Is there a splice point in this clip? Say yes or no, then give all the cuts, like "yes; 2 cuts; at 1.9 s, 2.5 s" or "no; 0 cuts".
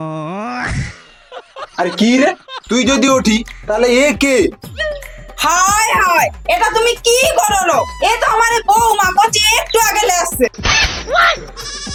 no; 0 cuts